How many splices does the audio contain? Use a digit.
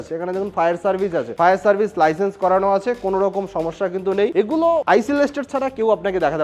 0